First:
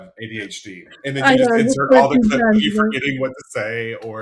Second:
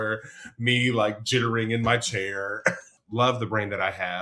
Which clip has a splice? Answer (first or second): second